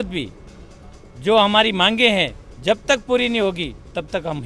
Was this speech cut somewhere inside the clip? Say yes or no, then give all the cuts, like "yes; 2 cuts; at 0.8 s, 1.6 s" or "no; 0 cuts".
no; 0 cuts